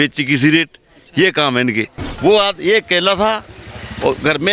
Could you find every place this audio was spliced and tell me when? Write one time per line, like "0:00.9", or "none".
0:02.0